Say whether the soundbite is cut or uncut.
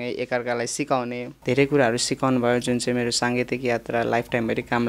cut